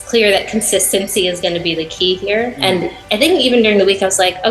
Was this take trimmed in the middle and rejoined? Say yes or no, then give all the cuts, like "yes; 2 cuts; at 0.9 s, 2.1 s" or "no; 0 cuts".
yes; 1 cut; at 2.5 s